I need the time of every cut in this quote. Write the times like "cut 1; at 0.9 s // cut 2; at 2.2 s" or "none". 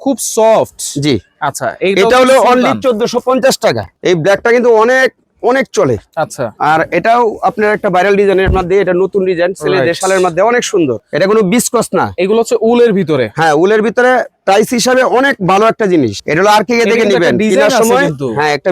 cut 1; at 3.9 s // cut 2; at 11.0 s // cut 3; at 16.2 s